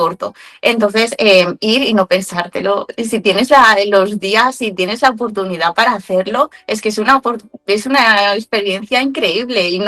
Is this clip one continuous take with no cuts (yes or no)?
yes